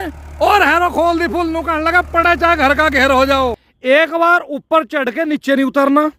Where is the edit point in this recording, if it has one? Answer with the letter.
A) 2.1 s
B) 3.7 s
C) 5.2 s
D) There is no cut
B